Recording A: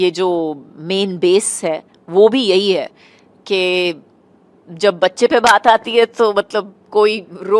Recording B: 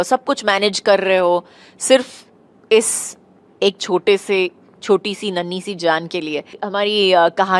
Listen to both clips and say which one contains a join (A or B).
B